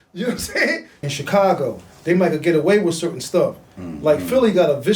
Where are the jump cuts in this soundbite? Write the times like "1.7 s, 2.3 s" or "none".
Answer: 0.9 s